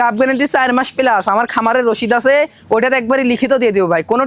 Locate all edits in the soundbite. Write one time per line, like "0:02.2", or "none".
none